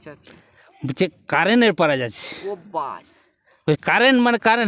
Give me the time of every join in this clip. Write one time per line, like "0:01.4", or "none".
none